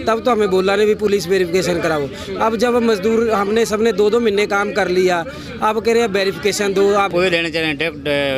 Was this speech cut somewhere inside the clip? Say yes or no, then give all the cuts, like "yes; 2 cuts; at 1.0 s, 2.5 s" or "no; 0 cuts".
yes; 1 cut; at 7.1 s